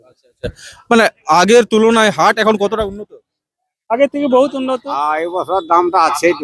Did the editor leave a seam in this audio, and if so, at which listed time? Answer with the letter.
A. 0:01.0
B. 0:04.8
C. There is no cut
B